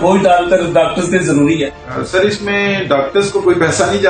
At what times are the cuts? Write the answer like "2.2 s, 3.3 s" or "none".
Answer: 1.8 s